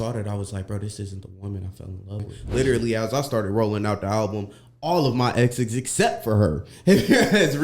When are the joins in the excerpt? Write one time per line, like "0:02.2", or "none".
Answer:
0:02.4